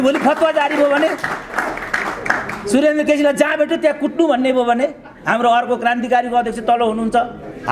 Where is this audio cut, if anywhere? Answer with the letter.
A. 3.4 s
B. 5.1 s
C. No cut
C